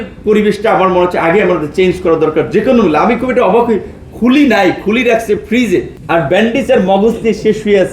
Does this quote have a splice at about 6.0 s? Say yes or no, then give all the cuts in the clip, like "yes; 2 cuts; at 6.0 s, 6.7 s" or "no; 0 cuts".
yes; 1 cut; at 6.0 s